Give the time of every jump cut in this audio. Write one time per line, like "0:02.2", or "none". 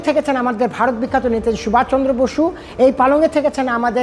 none